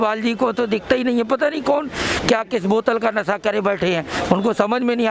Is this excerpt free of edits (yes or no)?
yes